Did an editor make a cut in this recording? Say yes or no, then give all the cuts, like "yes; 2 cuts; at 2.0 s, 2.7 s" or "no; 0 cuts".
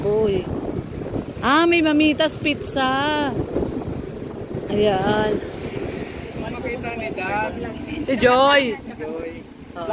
yes; 1 cut; at 6.5 s